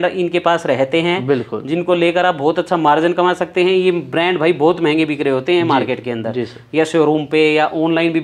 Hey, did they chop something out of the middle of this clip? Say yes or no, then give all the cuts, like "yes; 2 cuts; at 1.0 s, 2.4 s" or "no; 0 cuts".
no; 0 cuts